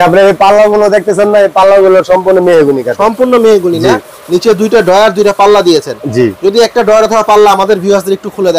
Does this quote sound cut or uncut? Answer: uncut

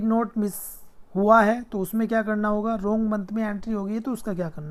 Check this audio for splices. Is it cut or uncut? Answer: uncut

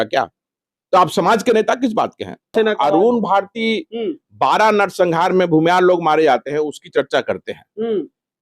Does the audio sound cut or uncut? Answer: cut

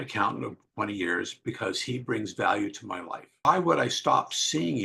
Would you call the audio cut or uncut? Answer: cut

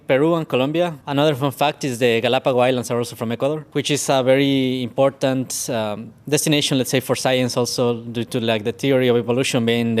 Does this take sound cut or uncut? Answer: cut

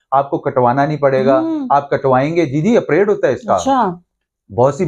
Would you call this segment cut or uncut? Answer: uncut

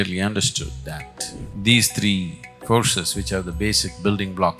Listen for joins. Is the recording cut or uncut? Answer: cut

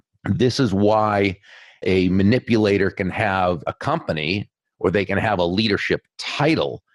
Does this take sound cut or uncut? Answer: uncut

